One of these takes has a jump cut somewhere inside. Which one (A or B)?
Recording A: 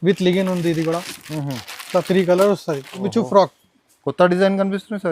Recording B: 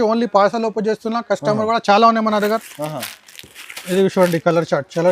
A